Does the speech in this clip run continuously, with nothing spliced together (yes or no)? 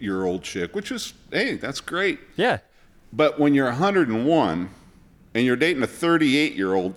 yes